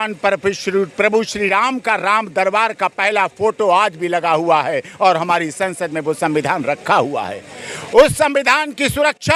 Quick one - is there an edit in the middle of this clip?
no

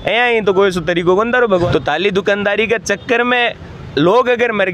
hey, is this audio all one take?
no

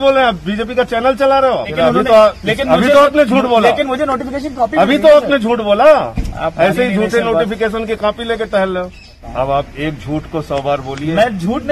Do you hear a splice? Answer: yes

